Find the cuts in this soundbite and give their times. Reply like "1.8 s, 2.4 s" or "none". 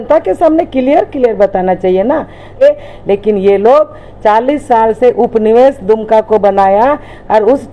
2.6 s

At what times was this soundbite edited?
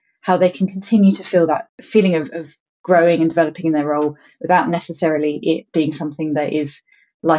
1.8 s

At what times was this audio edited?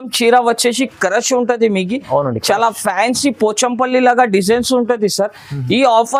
none

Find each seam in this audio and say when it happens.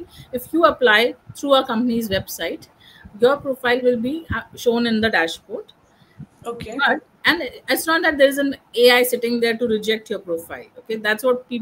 none

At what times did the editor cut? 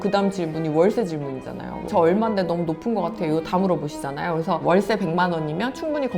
1.8 s

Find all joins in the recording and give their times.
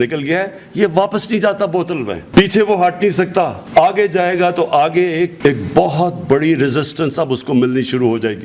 none

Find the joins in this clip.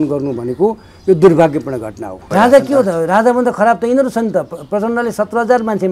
2.3 s

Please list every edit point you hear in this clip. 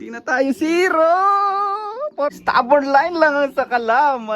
2.4 s

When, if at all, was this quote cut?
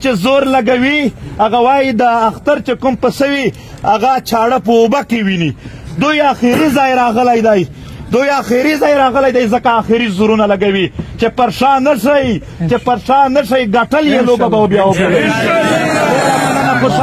none

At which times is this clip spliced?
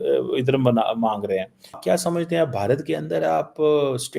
1.8 s

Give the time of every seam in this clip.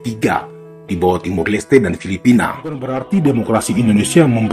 2.9 s

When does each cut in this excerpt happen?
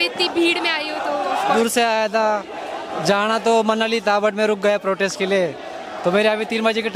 1.6 s

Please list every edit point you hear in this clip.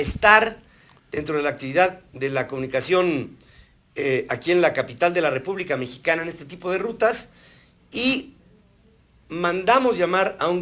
6.4 s

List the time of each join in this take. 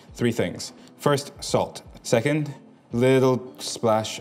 1.8 s

